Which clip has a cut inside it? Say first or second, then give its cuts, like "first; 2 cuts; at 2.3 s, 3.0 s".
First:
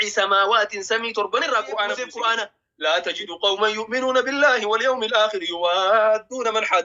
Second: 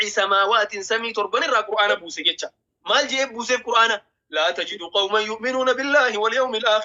first; 1 cut; at 2.1 s